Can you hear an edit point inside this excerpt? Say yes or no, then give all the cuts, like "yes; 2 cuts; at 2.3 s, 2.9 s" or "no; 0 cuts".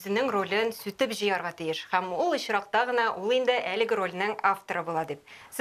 no; 0 cuts